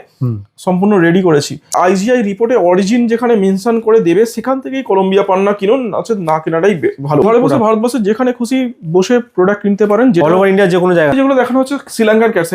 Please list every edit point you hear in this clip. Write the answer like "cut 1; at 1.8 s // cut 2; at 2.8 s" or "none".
cut 1; at 1.7 s // cut 2; at 7.2 s // cut 3; at 11.1 s

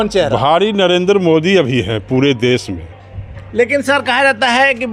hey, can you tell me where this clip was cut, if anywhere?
none

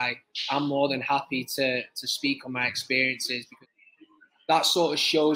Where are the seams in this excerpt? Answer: cut 1; at 3.5 s

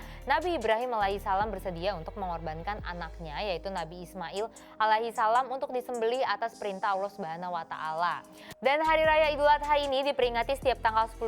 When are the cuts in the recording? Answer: cut 1; at 8.5 s

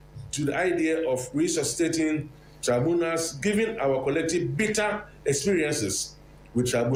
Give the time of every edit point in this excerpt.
none

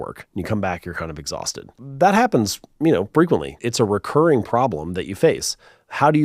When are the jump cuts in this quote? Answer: cut 1; at 1.8 s // cut 2; at 3.6 s

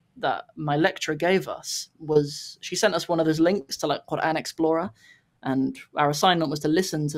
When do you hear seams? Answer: none

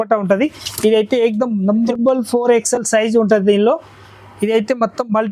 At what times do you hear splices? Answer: cut 1; at 1.9 s

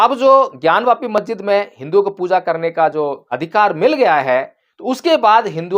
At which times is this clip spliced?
cut 1; at 3.2 s

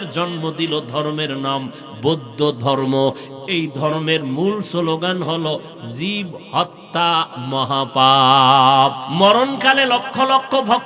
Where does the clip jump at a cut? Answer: cut 1; at 9.0 s

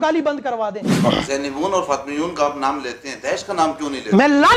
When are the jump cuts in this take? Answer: cut 1; at 0.9 s

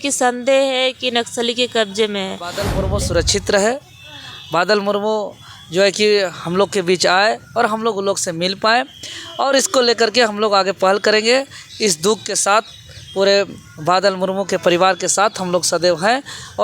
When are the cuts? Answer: cut 1; at 2.7 s

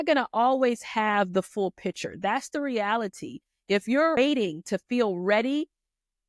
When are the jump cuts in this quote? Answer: cut 1; at 4.2 s

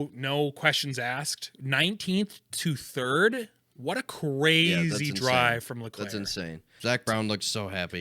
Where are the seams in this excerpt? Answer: cut 1; at 6.8 s

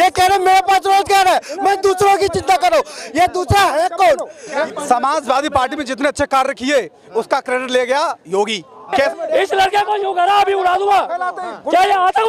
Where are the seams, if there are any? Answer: cut 1; at 4.7 s // cut 2; at 9.1 s

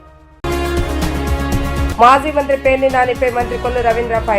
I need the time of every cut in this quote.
cut 1; at 1.9 s

